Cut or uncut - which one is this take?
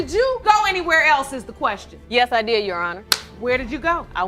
uncut